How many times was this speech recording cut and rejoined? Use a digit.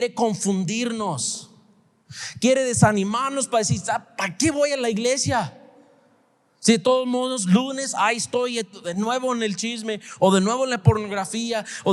0